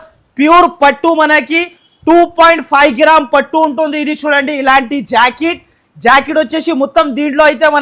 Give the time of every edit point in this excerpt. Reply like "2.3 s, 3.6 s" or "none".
none